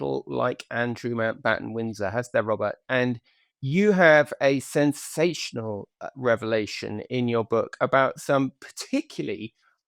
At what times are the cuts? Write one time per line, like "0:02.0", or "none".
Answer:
none